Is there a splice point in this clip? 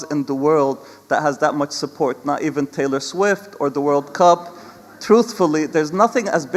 no; 0 cuts

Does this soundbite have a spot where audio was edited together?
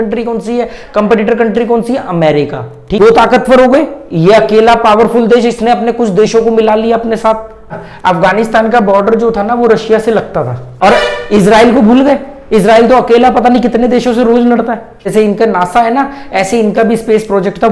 yes; 4 cuts; at 3.0 s, 7.7 s, 10.6 s, 15.1 s

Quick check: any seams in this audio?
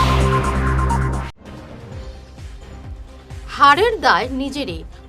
yes; 1 cut; at 3.4 s

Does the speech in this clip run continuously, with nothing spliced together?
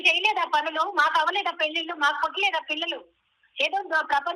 yes; 0 cuts

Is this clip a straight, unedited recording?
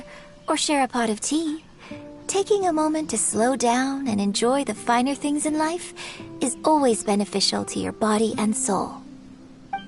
no; 1 cut; at 9.0 s

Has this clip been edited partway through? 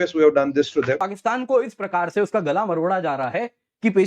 yes; 1 cut; at 1.1 s

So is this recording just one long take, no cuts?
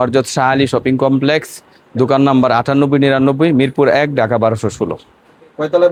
yes; 0 cuts

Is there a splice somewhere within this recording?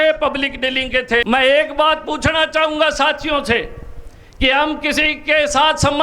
yes; 1 cut; at 1.2 s

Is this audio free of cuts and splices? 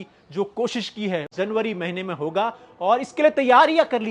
no; 1 cut; at 1.3 s

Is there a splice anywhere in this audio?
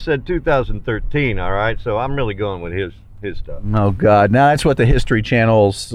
no; 0 cuts

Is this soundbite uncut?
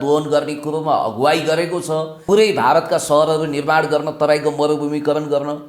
no; 1 cut; at 2.1 s

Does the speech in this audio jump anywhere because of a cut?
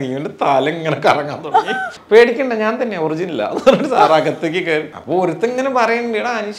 yes; 2 cuts; at 1.9 s, 5.0 s

